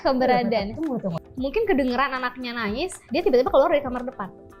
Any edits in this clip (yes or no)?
yes